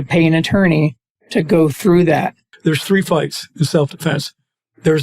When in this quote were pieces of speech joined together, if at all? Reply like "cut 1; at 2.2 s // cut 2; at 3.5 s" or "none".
cut 1; at 2.5 s